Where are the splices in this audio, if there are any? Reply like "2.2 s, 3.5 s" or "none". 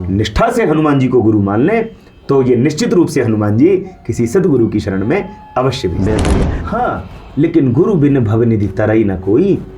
6.5 s